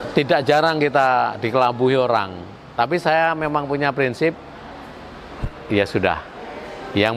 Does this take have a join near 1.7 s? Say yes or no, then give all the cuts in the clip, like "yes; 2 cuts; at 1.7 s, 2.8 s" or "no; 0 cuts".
no; 0 cuts